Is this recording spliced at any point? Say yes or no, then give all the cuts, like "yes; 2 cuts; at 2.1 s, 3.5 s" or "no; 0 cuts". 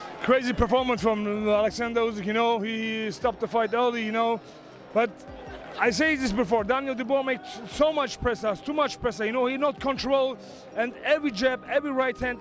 no; 0 cuts